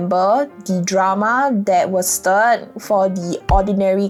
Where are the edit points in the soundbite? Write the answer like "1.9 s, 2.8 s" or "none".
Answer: none